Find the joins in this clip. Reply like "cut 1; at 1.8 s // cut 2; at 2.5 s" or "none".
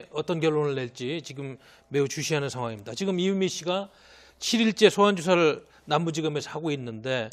none